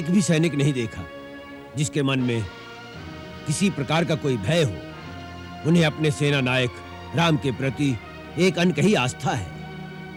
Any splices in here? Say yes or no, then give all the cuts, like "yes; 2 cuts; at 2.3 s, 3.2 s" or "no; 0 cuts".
no; 0 cuts